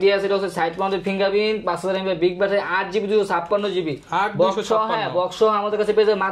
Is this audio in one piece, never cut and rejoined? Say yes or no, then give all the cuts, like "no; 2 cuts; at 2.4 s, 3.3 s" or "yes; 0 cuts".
yes; 0 cuts